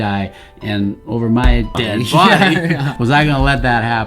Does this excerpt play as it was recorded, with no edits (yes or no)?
no